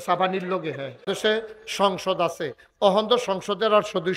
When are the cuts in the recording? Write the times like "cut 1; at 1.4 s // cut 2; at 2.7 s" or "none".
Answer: cut 1; at 1.1 s